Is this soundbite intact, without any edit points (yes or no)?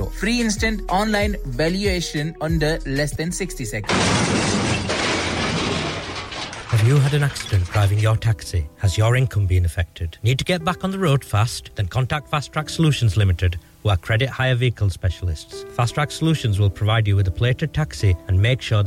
no